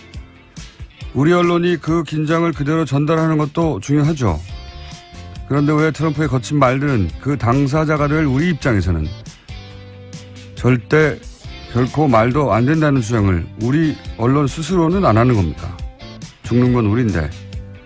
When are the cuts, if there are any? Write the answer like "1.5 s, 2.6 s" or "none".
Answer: none

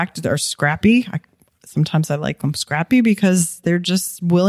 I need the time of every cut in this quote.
none

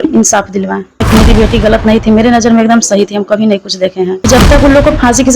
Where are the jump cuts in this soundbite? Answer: 1.1 s, 4.3 s

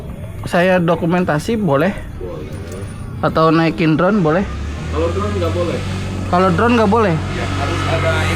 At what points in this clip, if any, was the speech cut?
none

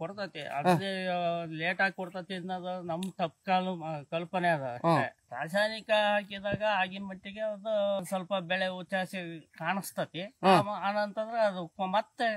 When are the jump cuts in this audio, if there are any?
5.2 s, 8.0 s

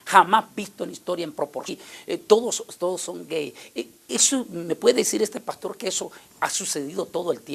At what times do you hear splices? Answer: none

